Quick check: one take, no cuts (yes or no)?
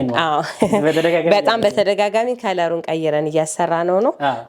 yes